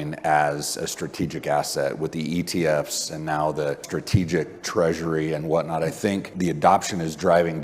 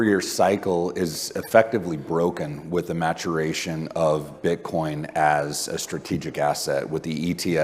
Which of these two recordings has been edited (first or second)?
first